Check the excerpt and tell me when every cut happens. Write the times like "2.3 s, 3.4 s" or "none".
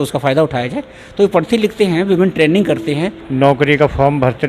3.2 s